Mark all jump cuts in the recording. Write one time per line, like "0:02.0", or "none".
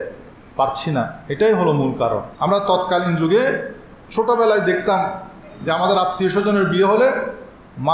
0:02.3